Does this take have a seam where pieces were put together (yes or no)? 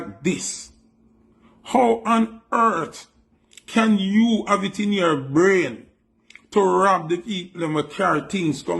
no